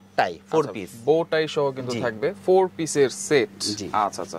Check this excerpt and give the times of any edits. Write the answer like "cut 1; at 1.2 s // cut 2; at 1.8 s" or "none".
none